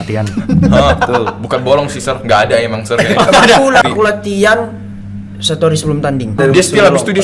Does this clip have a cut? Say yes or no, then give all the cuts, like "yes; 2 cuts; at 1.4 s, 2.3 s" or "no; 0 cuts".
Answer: yes; 2 cuts; at 3.8 s, 6.4 s